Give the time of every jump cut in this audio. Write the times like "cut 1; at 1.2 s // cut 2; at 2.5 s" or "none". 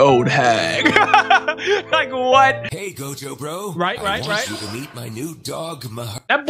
cut 1; at 2.7 s